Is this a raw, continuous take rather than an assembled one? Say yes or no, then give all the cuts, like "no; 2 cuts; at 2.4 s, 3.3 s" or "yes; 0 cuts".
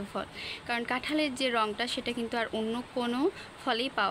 yes; 0 cuts